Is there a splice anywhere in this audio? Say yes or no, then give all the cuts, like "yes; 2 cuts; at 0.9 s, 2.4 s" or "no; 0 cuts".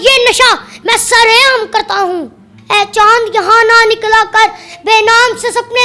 yes; 1 cut; at 2.5 s